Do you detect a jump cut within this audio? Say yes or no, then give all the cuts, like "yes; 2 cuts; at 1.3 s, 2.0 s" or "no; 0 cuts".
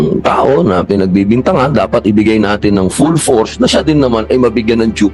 no; 0 cuts